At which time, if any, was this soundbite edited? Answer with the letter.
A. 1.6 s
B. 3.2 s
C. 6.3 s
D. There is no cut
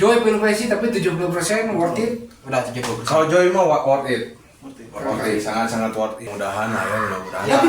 C